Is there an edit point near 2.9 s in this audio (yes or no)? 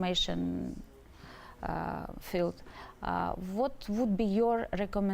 no